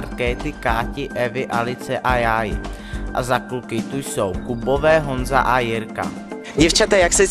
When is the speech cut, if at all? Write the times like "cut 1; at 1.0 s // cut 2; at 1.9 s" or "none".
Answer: none